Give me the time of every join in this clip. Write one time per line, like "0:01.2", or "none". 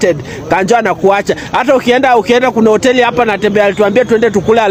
none